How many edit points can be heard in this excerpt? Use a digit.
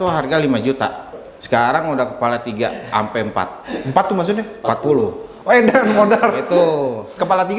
1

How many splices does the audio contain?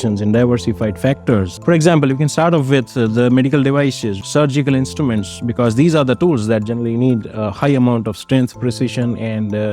2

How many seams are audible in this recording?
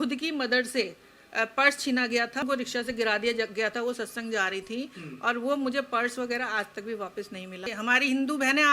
2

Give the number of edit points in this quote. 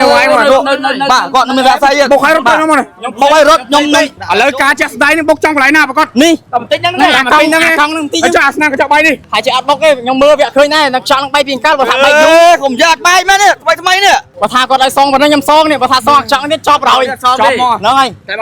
3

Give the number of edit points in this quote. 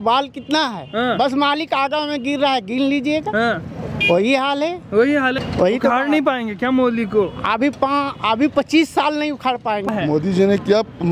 2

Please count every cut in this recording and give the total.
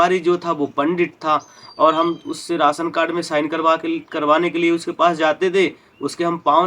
0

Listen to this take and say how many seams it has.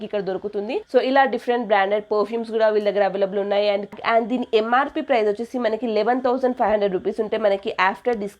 2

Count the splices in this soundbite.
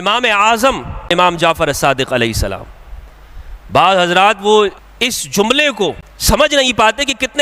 3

